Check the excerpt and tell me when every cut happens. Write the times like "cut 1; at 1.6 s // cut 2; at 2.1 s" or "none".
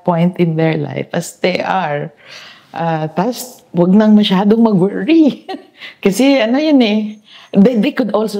none